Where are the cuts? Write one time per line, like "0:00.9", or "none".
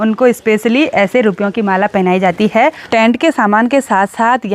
0:02.9

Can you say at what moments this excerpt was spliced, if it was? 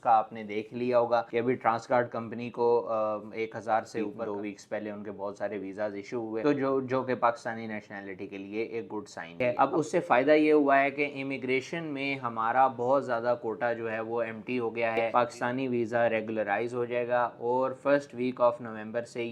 0:04.2
0:09.4
0:15.1

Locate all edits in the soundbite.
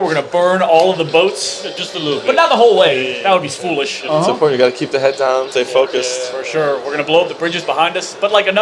0:04.0
0:05.5

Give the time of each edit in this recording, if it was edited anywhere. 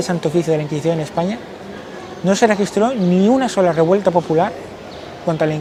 none

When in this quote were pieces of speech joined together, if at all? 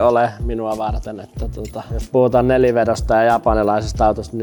none

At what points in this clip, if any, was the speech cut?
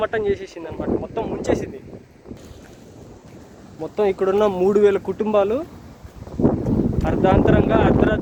none

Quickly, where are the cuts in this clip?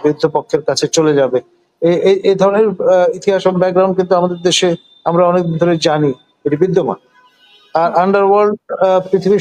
none

